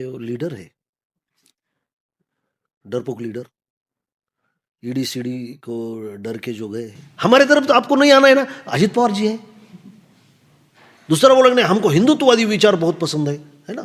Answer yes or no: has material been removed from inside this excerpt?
yes